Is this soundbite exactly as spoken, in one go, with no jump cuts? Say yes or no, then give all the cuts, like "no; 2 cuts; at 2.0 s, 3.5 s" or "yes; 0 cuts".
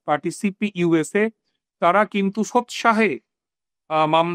yes; 0 cuts